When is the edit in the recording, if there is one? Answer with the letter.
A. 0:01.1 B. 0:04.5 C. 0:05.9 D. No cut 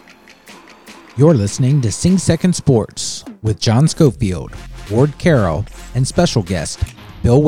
A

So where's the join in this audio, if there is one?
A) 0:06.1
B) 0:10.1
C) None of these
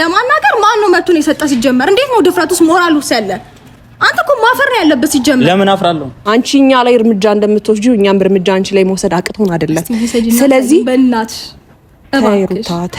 A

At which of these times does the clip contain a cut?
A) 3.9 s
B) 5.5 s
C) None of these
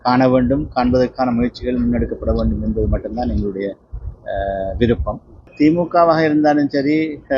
B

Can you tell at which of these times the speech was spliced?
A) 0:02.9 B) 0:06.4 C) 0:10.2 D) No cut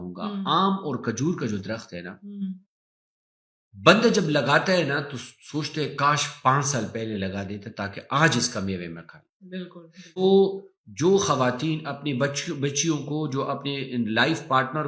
C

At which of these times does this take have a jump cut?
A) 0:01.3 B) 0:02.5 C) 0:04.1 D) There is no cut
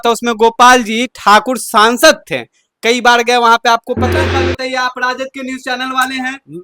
C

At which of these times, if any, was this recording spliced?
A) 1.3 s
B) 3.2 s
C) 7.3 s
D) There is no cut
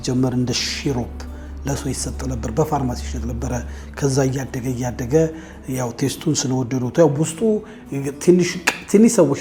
D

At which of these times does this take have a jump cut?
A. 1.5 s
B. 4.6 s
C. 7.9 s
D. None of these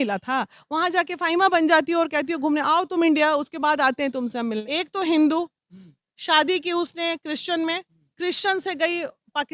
B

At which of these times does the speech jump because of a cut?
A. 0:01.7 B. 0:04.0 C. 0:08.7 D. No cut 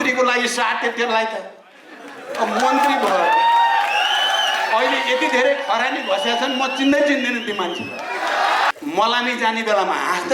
C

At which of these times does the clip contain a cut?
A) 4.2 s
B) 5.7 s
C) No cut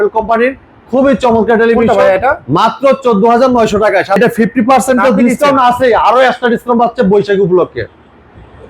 A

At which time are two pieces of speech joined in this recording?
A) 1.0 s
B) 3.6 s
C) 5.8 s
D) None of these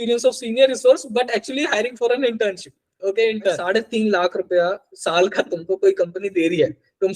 B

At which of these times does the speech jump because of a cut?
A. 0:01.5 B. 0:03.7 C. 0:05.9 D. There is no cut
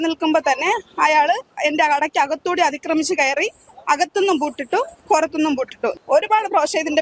C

